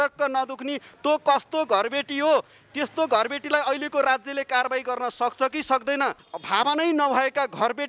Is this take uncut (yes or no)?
no